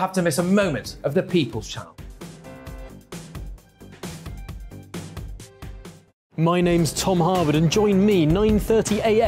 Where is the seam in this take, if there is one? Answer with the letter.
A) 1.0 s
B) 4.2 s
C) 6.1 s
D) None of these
C